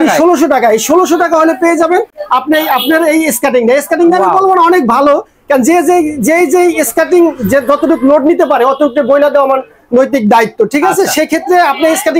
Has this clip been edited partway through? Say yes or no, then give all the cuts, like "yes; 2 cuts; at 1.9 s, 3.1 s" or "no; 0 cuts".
no; 0 cuts